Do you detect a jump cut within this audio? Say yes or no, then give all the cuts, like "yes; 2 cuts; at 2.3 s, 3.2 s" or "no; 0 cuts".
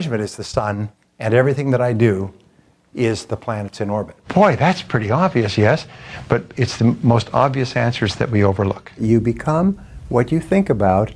yes; 2 cuts; at 4.2 s, 9.0 s